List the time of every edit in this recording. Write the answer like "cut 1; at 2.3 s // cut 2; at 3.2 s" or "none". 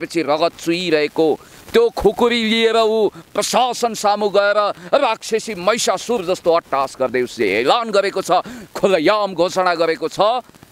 none